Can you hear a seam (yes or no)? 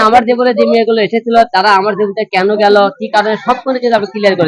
no